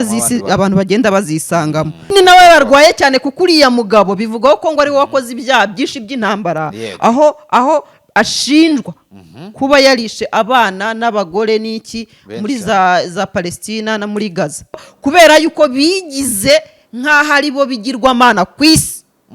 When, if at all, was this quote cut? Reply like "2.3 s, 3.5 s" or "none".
2.1 s, 14.8 s